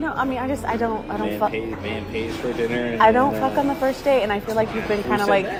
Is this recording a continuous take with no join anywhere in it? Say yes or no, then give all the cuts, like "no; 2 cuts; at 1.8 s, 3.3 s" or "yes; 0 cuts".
yes; 0 cuts